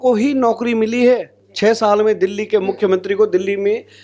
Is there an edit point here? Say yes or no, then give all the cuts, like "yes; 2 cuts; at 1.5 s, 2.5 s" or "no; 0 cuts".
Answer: no; 0 cuts